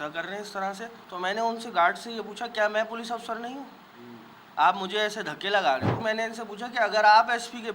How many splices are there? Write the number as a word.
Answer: two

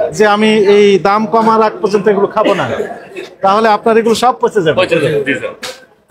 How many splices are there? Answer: zero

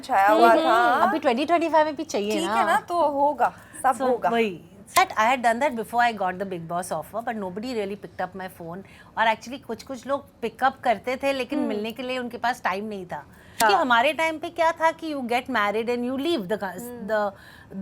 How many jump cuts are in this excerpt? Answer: two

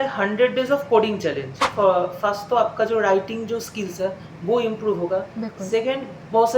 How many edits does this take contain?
one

